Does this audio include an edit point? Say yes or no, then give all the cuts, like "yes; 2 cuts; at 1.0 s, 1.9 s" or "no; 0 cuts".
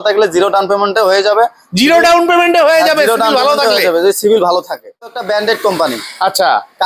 yes; 1 cut; at 5.1 s